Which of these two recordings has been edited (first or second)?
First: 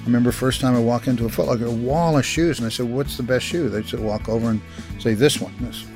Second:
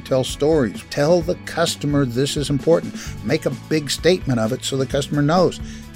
second